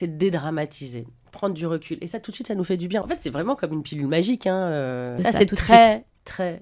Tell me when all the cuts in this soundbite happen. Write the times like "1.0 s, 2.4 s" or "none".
3.0 s, 5.1 s